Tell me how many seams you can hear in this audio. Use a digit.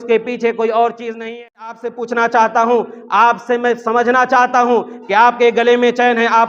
1